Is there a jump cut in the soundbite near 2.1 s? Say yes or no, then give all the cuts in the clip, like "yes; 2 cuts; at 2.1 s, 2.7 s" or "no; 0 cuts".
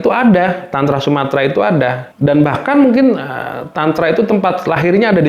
yes; 1 cut; at 2.1 s